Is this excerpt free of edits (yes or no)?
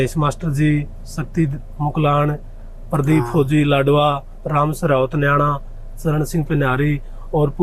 yes